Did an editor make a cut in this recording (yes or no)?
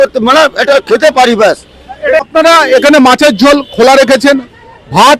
yes